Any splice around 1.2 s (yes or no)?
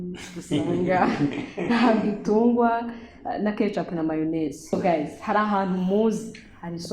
no